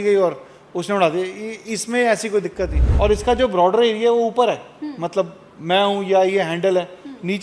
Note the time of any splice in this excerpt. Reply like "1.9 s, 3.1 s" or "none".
2.8 s